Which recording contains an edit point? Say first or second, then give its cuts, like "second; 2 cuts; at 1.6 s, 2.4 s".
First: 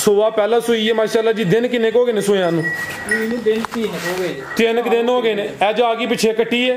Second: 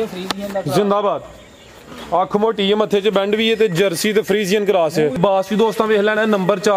second; 1 cut; at 5.2 s